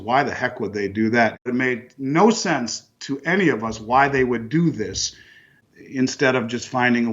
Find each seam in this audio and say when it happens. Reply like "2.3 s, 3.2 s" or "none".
1.4 s